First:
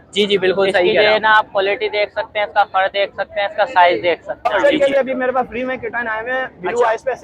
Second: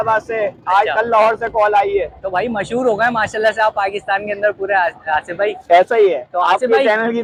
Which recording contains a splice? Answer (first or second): first